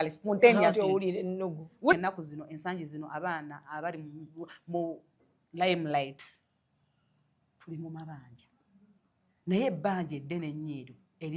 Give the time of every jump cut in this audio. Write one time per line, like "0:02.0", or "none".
0:01.9